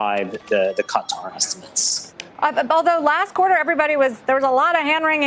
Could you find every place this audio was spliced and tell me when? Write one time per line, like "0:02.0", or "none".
none